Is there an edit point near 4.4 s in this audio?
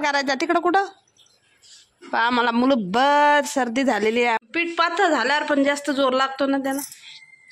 yes; 1 cut; at 4.4 s

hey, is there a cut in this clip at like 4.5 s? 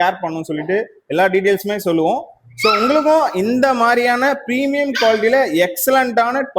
no; 0 cuts

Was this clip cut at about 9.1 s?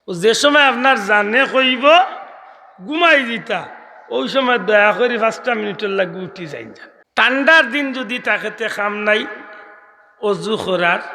no; 1 cut; at 7.3 s

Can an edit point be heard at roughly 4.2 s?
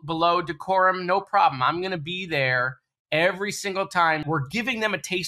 yes; 1 cut; at 4.2 s

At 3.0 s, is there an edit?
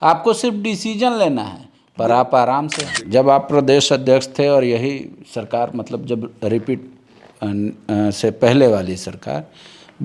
yes; 1 cut; at 3.0 s

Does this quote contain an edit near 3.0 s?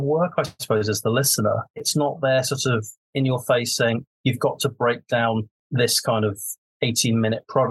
yes; 3 cuts; at 1.8 s, 3.0 s, 5.6 s

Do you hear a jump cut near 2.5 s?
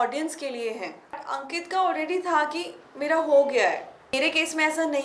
no; 2 cuts; at 1.2 s, 4.1 s

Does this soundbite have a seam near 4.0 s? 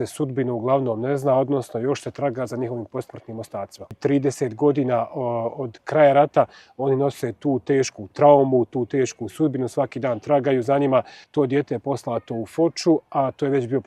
yes; 2 cuts; at 4.0 s, 11.2 s

